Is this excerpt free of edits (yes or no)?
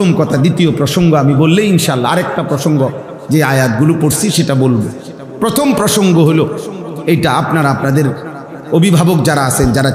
yes